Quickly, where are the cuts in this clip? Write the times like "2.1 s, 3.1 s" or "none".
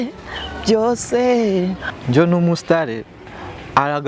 1.9 s